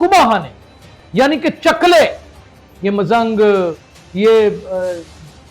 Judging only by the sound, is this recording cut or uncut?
uncut